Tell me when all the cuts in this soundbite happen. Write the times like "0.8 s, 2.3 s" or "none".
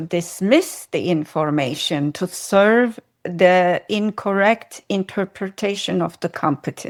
none